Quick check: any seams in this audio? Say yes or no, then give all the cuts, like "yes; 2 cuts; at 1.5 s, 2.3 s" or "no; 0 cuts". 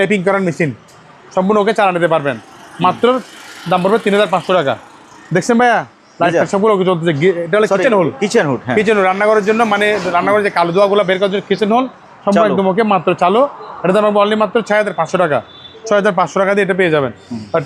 no; 0 cuts